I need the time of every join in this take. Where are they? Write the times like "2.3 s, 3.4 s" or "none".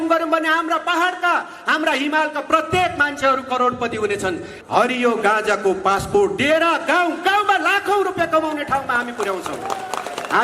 4.5 s